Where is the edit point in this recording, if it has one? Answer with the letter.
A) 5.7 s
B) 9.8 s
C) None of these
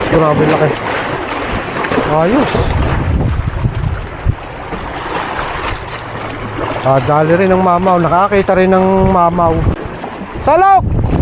B